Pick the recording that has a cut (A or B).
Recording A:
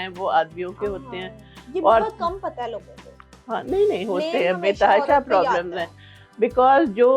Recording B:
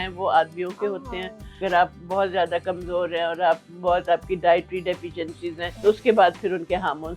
B